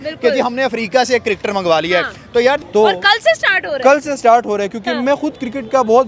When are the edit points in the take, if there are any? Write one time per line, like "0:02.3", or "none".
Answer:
0:02.6